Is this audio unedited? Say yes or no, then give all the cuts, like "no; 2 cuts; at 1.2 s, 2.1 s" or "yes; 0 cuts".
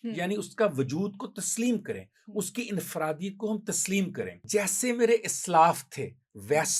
no; 1 cut; at 4.4 s